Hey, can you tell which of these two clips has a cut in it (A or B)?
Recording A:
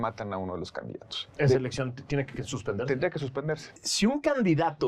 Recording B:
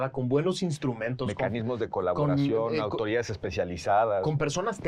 A